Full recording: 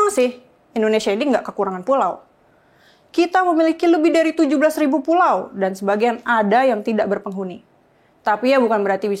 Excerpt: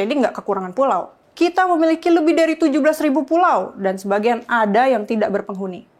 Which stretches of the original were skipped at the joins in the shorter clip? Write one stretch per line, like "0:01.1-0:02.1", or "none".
0:02.3-0:03.0

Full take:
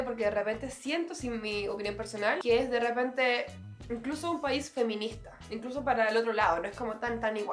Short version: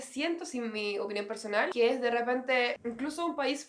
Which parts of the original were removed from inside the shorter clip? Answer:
0:03.5-0:03.8

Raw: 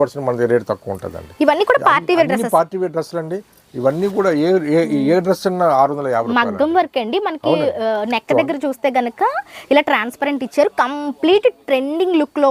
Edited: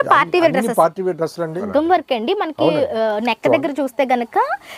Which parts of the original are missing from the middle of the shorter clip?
0:03.4-0:06.5

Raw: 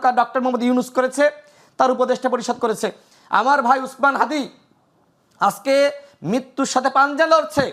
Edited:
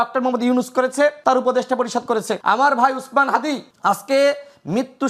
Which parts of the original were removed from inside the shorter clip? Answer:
0:01.4-0:01.7
0:02.9-0:03.2
0:04.6-0:05.3

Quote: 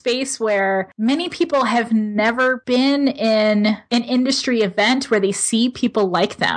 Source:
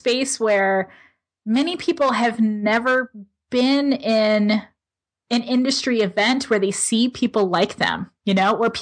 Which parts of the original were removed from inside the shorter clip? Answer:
0:00.9-0:01.4
0:03.1-0:03.4
0:04.7-0:05.2

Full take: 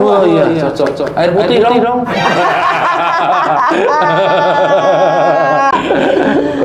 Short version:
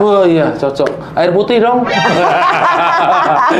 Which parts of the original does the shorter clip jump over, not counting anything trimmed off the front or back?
0:01.6-0:01.8

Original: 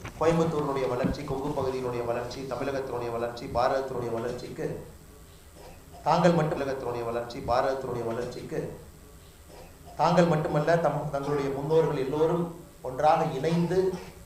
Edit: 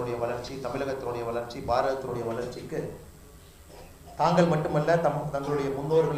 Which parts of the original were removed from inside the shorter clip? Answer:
0:06.5-0:10.5

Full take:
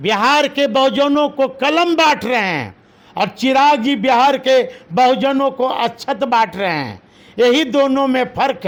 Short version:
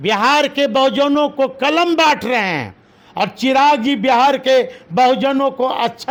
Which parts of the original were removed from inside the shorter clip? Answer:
none

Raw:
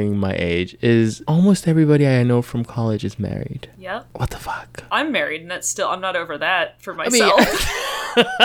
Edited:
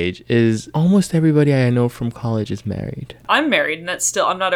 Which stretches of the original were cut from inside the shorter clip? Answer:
0:03.6-0:04.7

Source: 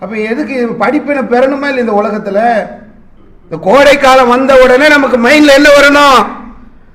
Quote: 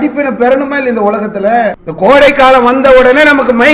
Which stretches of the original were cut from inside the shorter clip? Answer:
0:02.8-0:03.5

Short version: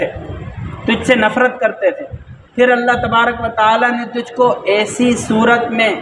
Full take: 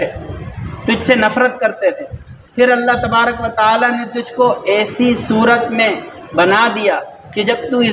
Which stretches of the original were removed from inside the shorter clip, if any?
none

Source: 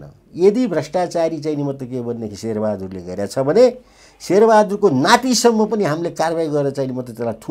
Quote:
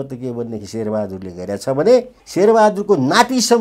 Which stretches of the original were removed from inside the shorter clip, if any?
0:03.9-0:04.1

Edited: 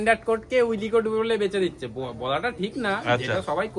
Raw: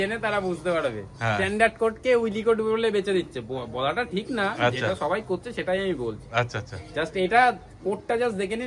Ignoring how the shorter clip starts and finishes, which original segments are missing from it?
none

